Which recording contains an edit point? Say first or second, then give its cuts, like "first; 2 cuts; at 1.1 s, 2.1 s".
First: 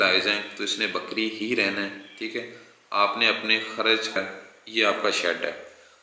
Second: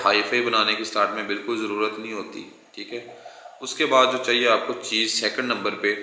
first; 1 cut; at 4.2 s